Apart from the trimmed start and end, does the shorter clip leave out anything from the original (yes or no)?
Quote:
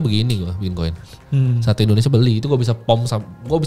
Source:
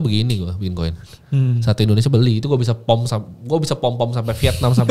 no